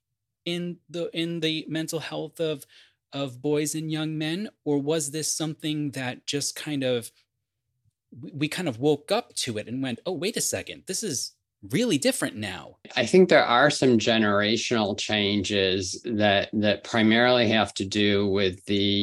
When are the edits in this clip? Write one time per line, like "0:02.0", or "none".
0:12.8